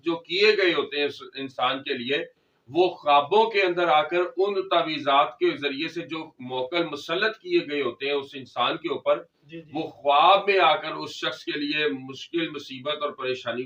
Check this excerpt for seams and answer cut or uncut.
uncut